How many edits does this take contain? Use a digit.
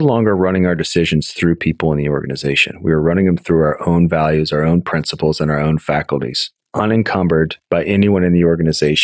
1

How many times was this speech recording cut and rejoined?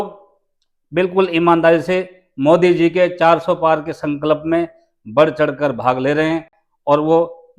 0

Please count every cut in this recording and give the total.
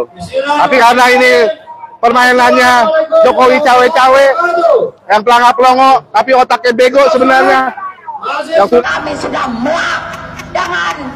1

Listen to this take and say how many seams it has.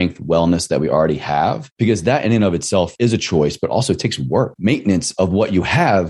3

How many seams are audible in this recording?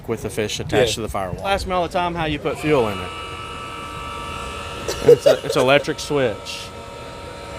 1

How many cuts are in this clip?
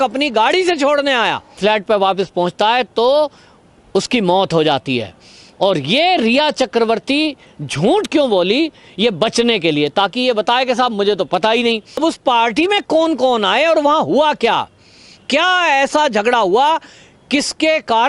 2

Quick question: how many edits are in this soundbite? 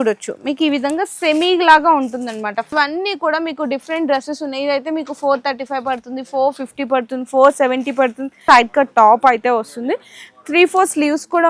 2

